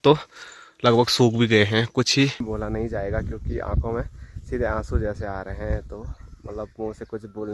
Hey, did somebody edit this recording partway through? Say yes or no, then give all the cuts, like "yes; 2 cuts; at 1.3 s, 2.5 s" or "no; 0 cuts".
yes; 1 cut; at 2.4 s